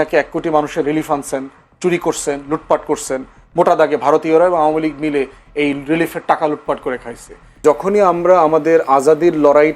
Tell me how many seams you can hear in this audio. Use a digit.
1